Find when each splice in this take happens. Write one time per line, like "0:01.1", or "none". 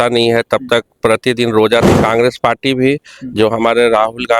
0:01.9